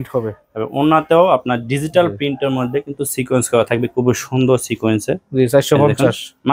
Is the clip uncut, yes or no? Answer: yes